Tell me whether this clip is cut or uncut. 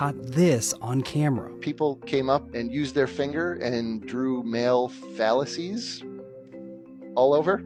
uncut